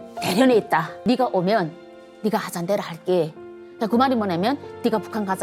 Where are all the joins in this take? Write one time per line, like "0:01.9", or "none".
0:00.9